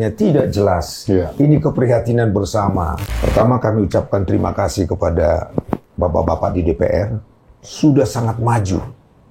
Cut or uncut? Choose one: cut